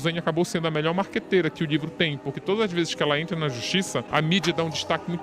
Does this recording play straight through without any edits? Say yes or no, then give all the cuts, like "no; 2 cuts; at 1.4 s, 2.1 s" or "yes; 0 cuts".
no; 1 cut; at 4.1 s